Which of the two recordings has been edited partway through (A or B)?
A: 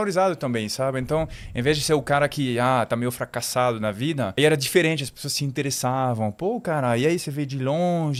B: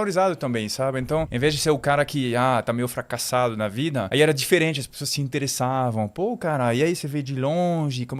B